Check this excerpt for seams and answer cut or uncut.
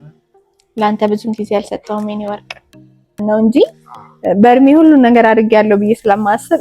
cut